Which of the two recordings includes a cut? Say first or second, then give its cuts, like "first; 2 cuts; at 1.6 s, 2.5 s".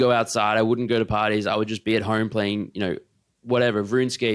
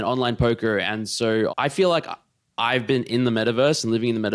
second; 1 cut; at 1.5 s